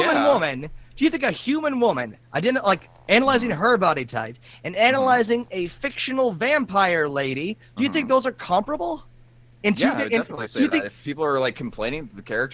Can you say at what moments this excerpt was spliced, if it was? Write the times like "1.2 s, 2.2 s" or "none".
none